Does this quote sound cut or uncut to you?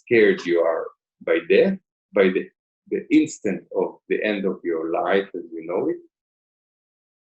uncut